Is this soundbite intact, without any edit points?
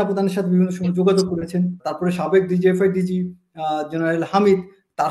no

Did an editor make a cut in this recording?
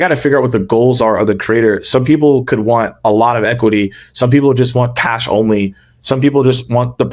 no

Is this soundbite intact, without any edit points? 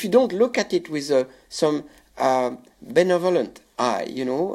yes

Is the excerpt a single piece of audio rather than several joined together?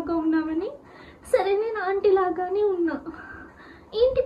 yes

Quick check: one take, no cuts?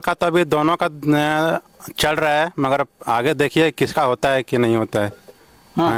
yes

